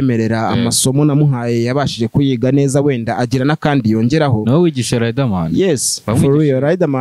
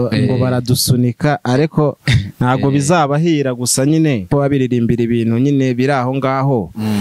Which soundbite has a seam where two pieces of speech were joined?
second; 1 cut; at 4.3 s

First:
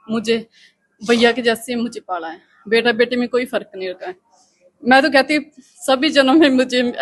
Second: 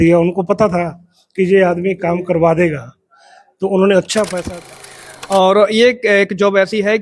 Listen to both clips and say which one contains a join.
second; 1 cut; at 4.6 s

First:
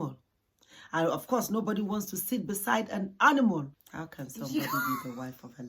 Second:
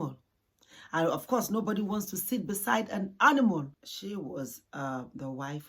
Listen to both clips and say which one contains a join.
first; 1 cut; at 3.8 s

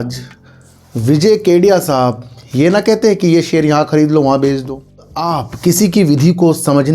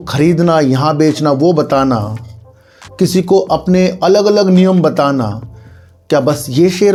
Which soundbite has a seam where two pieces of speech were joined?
first; 1 cut; at 5.2 s

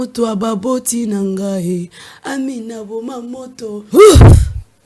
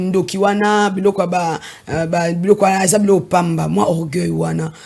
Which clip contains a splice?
first; 1 cut; at 3.8 s

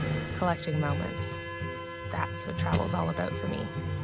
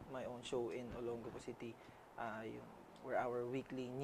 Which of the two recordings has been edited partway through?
first; 1 cut; at 1.2 s

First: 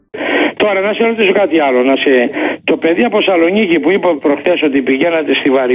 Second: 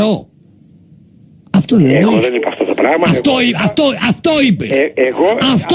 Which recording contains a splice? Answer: second; 1 cut; at 2.4 s

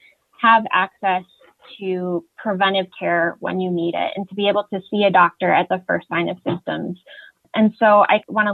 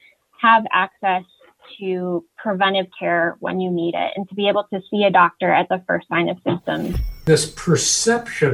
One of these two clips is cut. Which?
second; 1 cut; at 7.3 s

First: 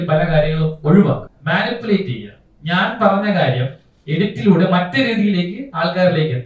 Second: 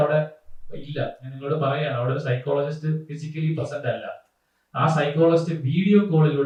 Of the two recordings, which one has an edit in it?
first; 1 cut; at 1.3 s

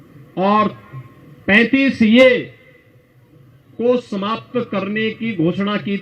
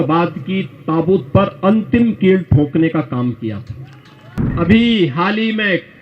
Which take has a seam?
second; 1 cut; at 4.4 s

